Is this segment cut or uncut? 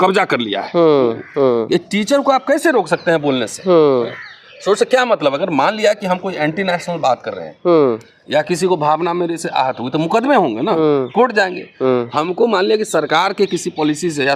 uncut